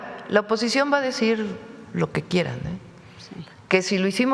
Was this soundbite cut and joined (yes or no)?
no